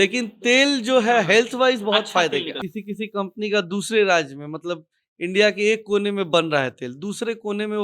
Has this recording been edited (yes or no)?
yes